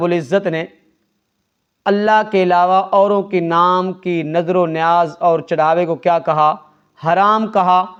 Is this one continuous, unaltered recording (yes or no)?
yes